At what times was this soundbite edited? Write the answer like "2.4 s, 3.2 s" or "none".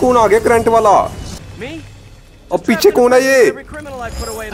1.3 s